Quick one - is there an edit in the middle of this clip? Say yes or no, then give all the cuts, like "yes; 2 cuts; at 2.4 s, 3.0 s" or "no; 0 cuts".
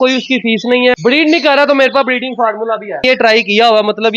yes; 2 cuts; at 1.0 s, 3.0 s